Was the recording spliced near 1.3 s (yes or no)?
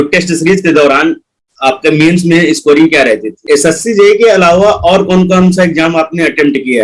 no